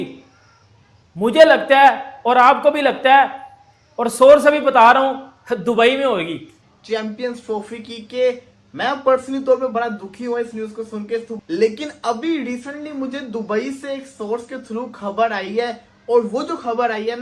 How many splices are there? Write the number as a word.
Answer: two